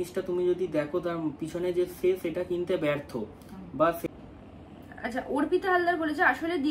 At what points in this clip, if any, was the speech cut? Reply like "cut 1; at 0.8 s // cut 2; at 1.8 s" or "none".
cut 1; at 4.1 s